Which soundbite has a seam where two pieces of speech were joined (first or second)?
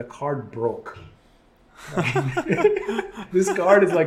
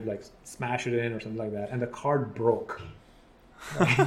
first